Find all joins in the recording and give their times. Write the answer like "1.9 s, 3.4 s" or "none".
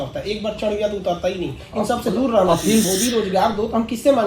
2.9 s

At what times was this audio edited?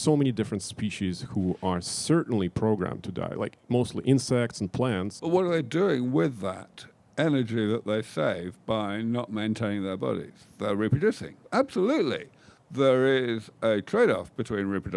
5.1 s, 11.3 s

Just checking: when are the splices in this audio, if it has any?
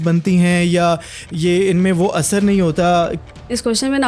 3.2 s

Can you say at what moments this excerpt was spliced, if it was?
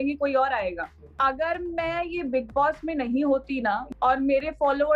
1.0 s, 3.9 s

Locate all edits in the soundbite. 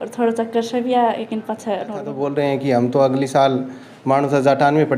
2.2 s

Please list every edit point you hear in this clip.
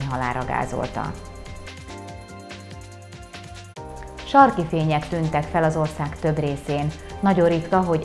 none

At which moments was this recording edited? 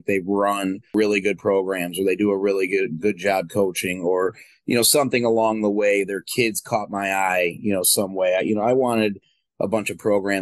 0.9 s

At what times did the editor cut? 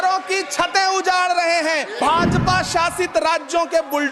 1.9 s

